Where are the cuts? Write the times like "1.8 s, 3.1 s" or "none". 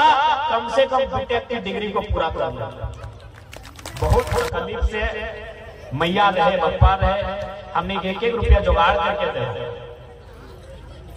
3.9 s